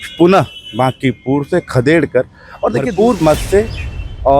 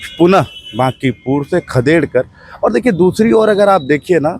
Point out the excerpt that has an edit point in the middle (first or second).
first